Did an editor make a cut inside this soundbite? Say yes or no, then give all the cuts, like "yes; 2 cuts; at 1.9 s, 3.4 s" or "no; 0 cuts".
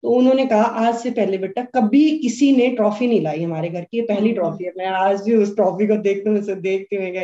no; 0 cuts